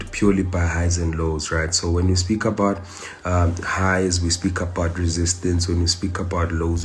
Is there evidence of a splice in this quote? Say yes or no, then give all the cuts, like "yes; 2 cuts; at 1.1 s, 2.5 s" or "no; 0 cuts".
no; 0 cuts